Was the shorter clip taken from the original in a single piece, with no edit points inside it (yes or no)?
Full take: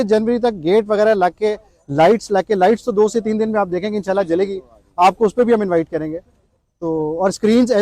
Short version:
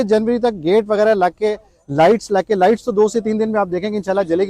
yes